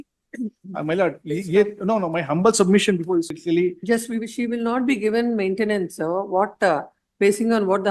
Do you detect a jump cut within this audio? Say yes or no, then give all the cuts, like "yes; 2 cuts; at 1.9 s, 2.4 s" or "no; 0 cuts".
yes; 1 cut; at 3.3 s